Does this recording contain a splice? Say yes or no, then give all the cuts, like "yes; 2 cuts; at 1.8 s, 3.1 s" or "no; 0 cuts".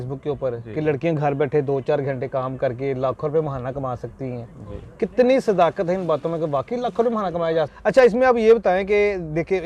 yes; 1 cut; at 7.7 s